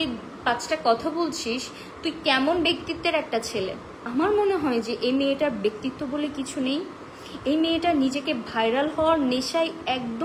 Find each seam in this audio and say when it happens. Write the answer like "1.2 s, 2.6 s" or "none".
4.0 s

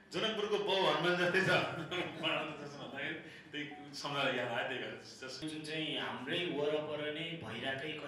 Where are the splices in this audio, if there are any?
5.4 s

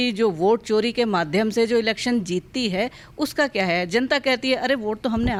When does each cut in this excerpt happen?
none

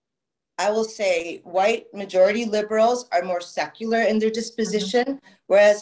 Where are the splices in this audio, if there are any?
none

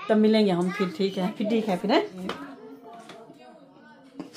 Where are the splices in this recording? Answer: 2.2 s

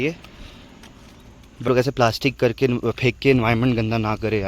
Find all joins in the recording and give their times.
1.7 s

